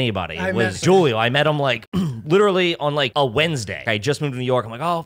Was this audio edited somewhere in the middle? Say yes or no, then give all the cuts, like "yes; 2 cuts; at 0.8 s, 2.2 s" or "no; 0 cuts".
yes; 3 cuts; at 0.8 s, 3.1 s, 3.8 s